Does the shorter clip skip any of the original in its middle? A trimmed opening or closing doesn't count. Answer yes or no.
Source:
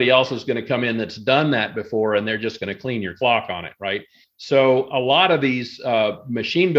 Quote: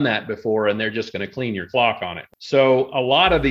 yes